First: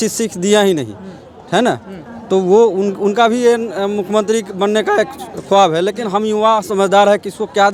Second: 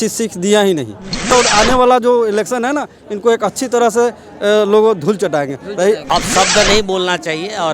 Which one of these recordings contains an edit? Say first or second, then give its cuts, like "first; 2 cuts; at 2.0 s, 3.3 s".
second; 2 cuts; at 1.5 s, 6.0 s